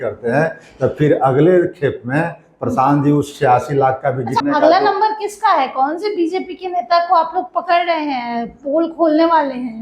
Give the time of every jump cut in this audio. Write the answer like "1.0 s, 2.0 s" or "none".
4.4 s

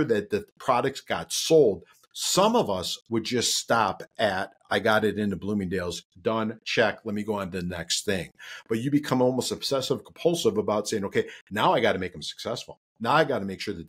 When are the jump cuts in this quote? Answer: none

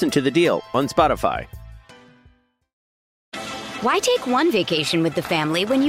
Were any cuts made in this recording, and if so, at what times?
3.2 s

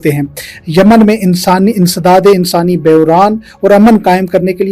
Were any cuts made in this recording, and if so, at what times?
none

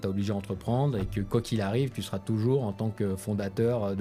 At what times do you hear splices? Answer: none

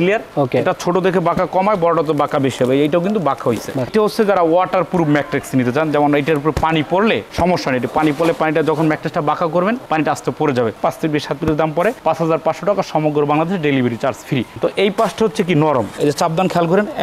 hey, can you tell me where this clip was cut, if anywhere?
3.9 s, 10.8 s, 14.5 s

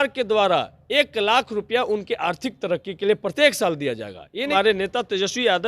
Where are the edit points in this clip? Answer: 4.5 s

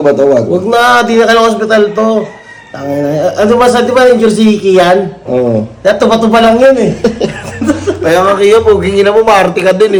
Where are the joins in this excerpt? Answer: none

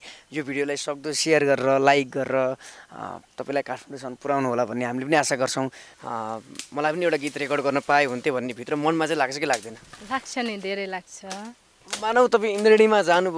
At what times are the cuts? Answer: 5.9 s

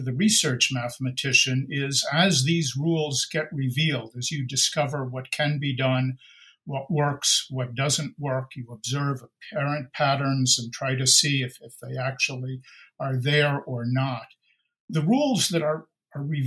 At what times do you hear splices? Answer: 14.9 s

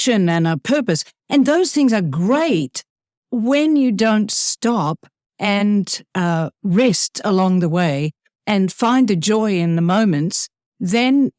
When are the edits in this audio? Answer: none

